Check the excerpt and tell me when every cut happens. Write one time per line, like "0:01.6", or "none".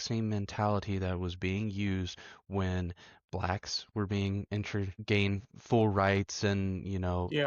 0:05.0